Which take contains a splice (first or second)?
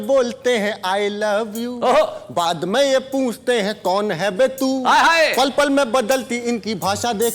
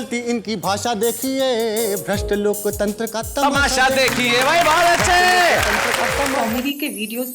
second